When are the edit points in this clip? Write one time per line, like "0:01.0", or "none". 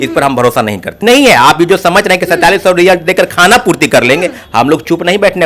0:01.0